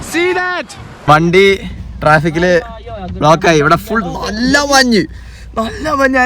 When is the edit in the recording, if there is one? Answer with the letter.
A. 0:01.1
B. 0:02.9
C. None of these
A